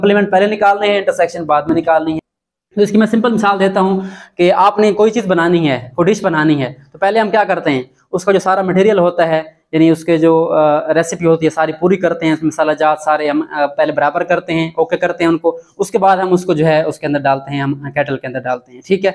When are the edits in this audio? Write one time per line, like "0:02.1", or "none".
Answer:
0:02.2